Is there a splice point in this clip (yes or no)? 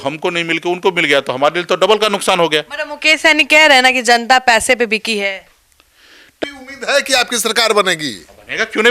yes